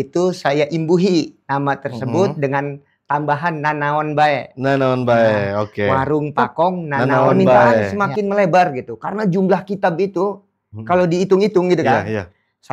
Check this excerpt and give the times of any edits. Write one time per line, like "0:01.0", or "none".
0:07.9